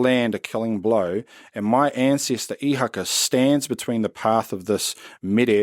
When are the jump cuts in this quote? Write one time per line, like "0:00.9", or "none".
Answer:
none